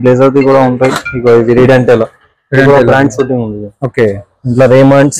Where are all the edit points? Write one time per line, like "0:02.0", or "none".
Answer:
none